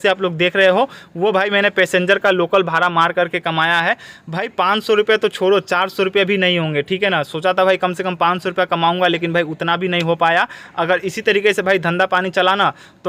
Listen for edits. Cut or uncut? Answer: uncut